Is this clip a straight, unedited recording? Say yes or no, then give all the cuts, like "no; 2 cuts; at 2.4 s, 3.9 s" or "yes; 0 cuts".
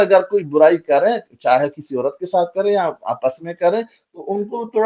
yes; 0 cuts